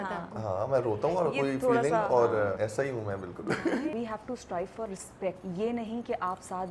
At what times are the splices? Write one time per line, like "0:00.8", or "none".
0:02.6
0:03.9
0:05.4